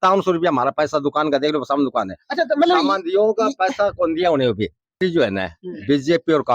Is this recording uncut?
no; 1 cut; at 5.0 s

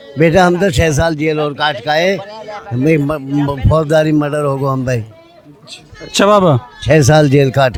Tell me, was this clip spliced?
no; 0 cuts

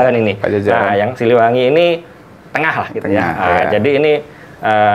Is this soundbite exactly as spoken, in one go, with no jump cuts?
yes; 0 cuts

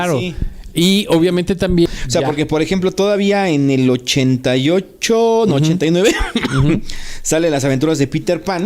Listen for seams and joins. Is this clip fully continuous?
no; 1 cut; at 1.9 s

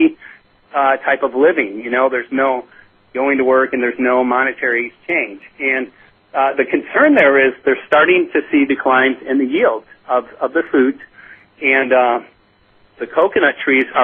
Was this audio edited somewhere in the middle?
no; 0 cuts

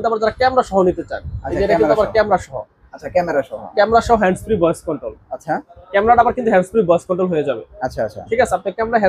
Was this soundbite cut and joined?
no; 0 cuts

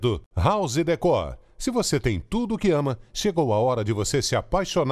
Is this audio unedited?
yes; 0 cuts

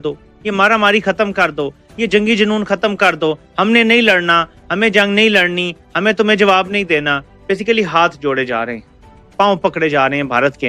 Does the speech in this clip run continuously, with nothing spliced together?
no; 1 cut; at 7.3 s

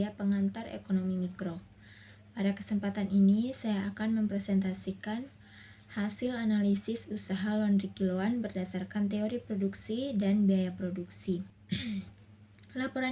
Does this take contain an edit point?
yes; 1 cut; at 11.6 s

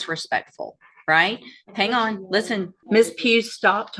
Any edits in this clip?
yes; 1 cut; at 2.8 s

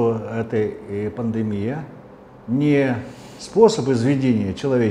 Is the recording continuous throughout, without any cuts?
yes; 0 cuts

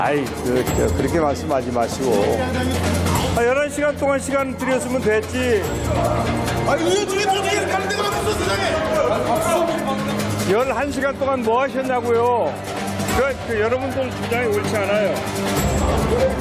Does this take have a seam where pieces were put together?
no; 0 cuts

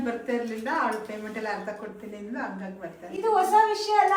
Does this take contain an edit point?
no; 0 cuts

